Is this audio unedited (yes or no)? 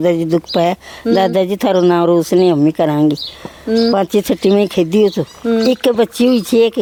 yes